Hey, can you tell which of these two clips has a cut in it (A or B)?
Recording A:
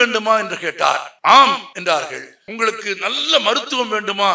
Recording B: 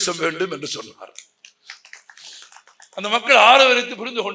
A